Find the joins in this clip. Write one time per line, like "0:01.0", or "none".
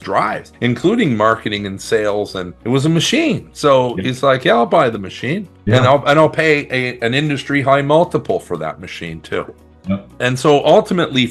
none